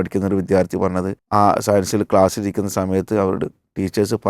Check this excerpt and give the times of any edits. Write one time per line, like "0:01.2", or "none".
0:01.2